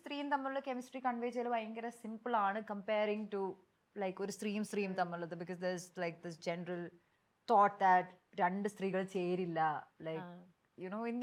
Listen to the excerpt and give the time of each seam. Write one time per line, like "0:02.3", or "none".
none